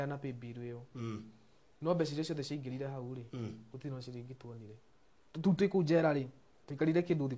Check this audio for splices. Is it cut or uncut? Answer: cut